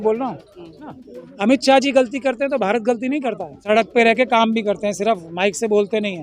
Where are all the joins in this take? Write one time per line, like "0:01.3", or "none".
0:00.9
0:03.6